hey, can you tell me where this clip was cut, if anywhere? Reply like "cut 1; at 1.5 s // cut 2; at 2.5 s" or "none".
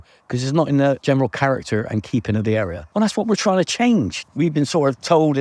cut 1; at 1.0 s // cut 2; at 2.8 s // cut 3; at 4.2 s